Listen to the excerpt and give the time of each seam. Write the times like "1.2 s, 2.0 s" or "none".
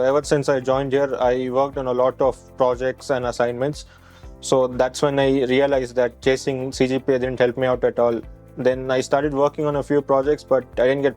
4.0 s